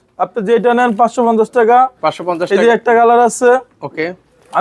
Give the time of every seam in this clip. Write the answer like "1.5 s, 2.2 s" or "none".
none